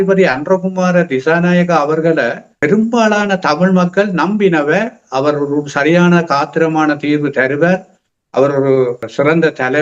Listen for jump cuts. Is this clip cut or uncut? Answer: uncut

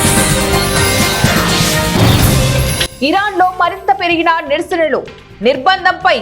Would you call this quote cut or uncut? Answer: cut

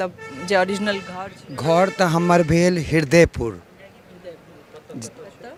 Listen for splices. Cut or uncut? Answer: uncut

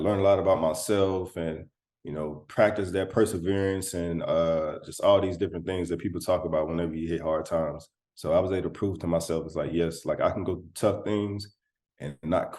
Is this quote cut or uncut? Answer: uncut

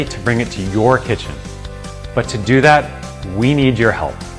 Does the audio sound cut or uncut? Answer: uncut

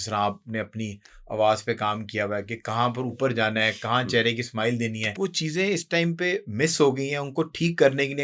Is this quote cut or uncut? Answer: cut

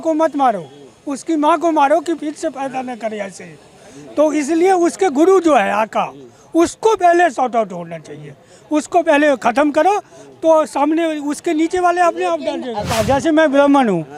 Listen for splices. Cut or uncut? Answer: uncut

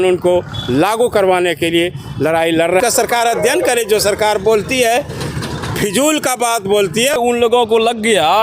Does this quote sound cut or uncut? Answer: cut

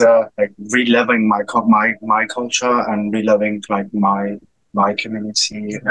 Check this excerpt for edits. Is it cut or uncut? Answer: uncut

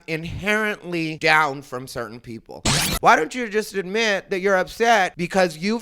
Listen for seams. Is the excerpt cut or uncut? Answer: cut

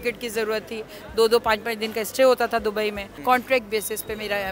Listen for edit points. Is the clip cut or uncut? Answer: cut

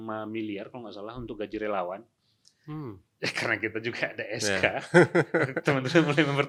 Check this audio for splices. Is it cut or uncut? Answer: uncut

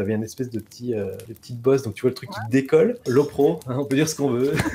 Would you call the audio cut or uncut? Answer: cut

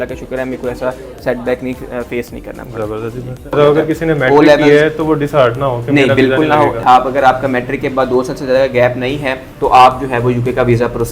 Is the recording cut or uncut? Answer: cut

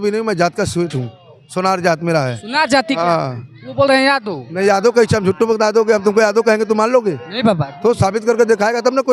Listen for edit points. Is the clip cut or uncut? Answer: uncut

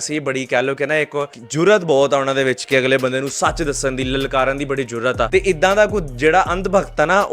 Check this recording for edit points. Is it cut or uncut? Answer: cut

